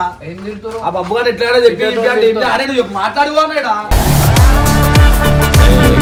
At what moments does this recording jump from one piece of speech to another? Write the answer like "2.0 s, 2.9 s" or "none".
none